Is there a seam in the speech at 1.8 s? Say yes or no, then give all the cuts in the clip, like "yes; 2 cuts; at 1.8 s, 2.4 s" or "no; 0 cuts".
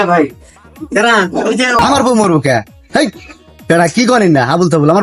yes; 1 cut; at 1.8 s